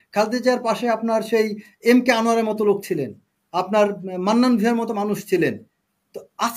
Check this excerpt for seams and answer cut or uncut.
uncut